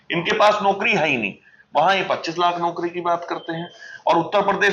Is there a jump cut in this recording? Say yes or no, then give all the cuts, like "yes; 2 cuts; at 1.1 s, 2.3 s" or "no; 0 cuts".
no; 0 cuts